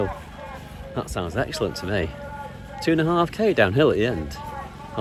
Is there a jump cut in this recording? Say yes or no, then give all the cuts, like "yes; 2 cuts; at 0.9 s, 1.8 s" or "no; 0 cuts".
no; 0 cuts